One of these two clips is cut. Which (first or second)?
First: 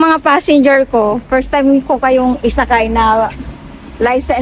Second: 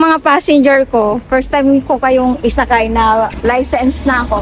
second